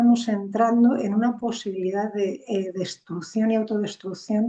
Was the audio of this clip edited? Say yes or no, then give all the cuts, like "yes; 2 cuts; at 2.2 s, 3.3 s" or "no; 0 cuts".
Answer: no; 0 cuts